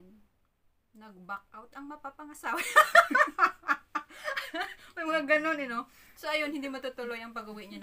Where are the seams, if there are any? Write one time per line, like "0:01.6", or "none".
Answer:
0:04.1